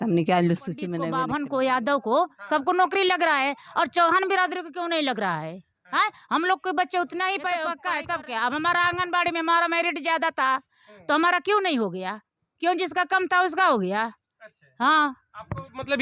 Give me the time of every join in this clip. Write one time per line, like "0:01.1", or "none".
0:01.0
0:07.8